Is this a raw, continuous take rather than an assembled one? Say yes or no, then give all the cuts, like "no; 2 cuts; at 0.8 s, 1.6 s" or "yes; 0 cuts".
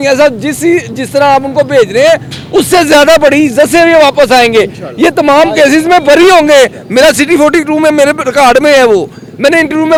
yes; 0 cuts